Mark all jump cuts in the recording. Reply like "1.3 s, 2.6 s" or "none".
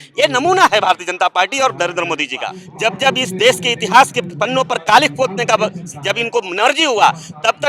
2.6 s

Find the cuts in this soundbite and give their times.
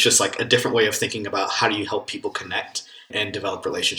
3.1 s

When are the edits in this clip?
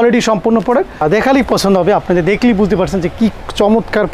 1.0 s

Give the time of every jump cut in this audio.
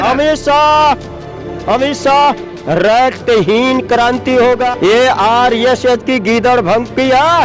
2.5 s, 4.7 s

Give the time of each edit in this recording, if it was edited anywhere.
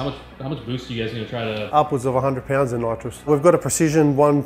1.6 s, 3.3 s

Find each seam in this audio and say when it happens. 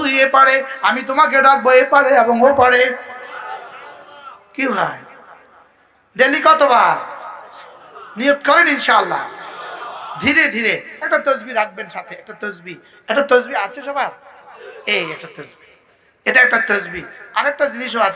none

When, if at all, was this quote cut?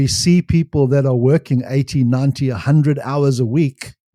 none

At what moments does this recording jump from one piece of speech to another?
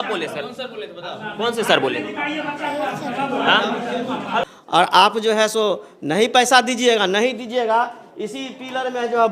4.4 s

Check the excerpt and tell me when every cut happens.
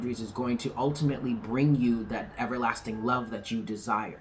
none

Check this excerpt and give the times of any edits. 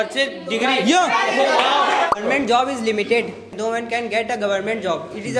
2.1 s, 3.5 s

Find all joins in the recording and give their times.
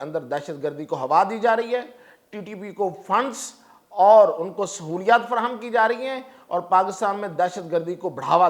none

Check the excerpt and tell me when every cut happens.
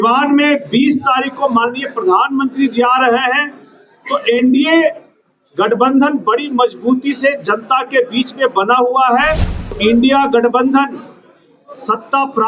9.8 s

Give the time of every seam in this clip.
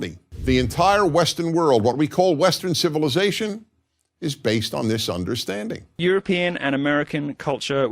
5.8 s

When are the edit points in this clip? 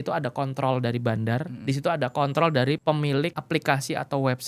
1.5 s, 3.0 s

